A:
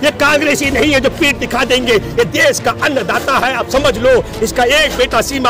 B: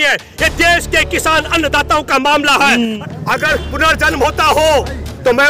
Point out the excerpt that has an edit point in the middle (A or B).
B